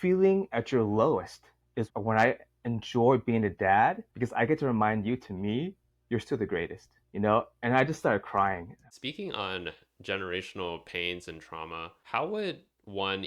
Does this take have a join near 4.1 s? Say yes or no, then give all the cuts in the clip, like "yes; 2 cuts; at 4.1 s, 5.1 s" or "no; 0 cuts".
yes; 2 cuts; at 4.1 s, 8.8 s